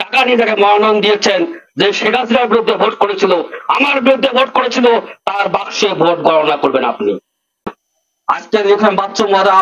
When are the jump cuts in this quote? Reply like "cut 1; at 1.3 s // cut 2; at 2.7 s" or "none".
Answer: cut 1; at 7.7 s